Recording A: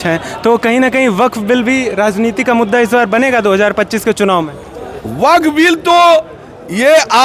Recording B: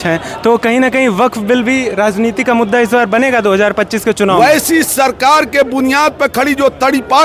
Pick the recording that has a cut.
B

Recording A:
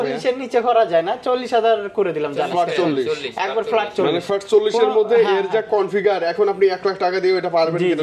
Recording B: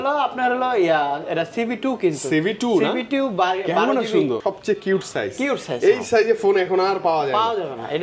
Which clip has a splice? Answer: B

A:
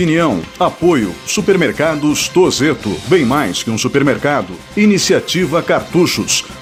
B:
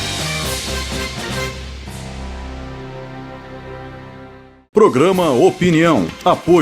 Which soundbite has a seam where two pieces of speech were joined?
B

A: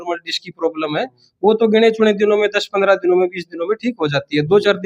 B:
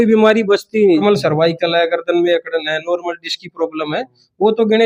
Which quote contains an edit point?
B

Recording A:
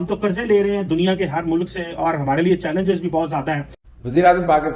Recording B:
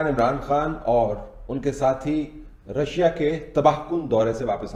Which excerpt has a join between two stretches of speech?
A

